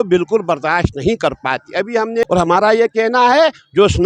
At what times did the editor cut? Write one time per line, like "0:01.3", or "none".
0:02.2